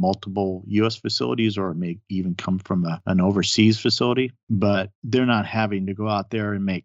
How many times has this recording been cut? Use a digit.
2